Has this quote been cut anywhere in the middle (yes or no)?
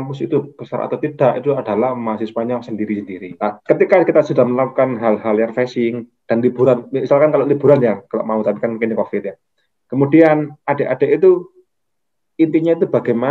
yes